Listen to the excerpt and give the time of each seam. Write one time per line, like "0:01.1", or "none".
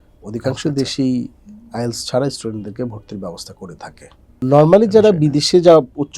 0:04.4